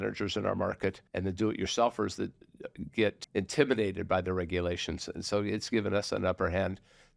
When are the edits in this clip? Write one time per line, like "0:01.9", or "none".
0:01.1
0:03.2